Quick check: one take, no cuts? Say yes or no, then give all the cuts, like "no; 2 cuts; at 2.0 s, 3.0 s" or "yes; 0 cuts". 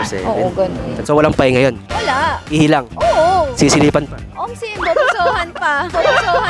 yes; 0 cuts